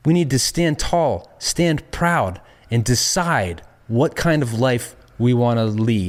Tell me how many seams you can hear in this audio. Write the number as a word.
zero